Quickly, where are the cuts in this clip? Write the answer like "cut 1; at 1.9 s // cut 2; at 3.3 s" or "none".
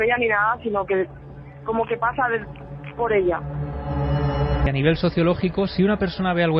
cut 1; at 4.3 s